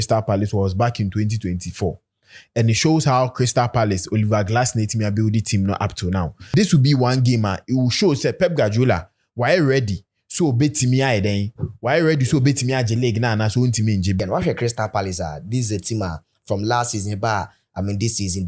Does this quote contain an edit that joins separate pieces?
yes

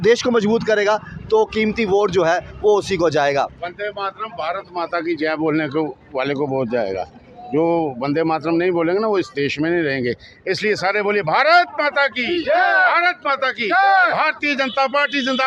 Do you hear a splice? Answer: no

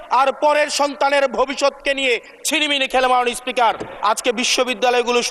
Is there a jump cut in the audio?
yes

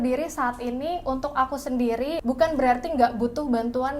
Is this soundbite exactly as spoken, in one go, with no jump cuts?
no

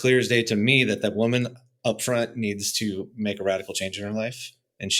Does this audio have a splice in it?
no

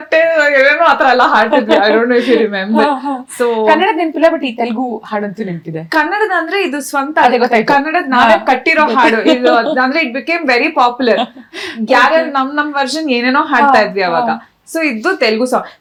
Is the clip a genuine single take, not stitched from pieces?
yes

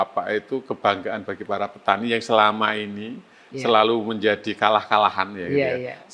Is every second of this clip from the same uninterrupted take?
yes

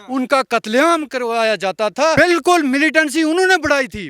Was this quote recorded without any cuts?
no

